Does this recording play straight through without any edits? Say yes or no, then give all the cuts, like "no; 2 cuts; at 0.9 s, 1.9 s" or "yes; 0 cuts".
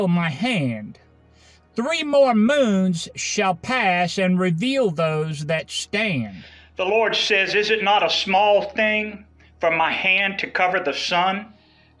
yes; 0 cuts